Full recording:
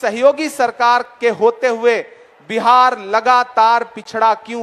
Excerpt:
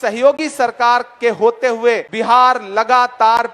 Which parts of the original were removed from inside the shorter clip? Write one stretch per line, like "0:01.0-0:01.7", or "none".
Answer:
0:02.1-0:02.5